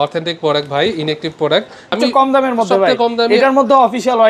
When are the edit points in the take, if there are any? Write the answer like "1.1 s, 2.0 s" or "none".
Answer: 1.9 s